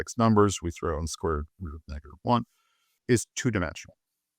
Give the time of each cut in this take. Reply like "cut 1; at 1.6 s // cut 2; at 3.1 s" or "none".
cut 1; at 3.0 s